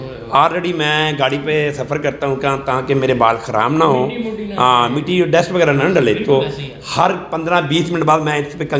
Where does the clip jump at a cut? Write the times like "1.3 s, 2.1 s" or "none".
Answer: none